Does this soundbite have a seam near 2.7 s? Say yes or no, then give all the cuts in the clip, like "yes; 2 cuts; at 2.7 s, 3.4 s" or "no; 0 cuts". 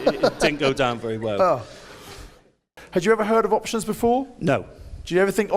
yes; 1 cut; at 2.7 s